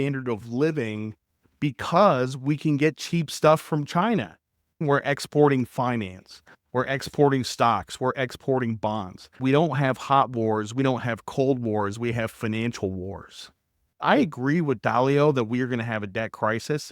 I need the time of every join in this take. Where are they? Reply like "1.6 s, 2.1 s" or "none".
4.8 s, 9.4 s, 14.0 s